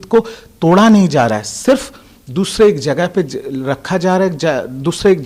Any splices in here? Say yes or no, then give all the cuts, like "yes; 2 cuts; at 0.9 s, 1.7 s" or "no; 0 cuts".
no; 0 cuts